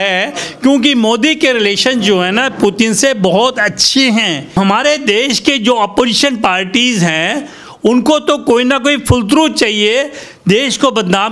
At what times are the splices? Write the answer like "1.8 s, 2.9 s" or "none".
4.5 s